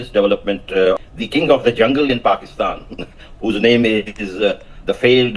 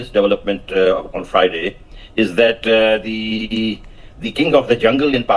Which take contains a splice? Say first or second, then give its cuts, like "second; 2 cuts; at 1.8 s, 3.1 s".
first; 1 cut; at 1.1 s